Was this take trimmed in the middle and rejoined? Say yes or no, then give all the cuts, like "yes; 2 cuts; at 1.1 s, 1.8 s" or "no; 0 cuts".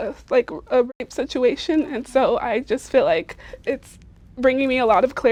no; 0 cuts